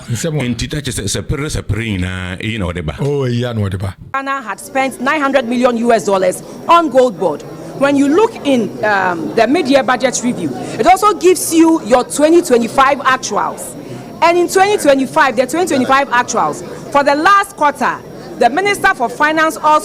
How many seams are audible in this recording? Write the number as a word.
one